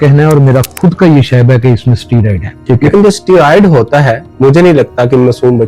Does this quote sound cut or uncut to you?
cut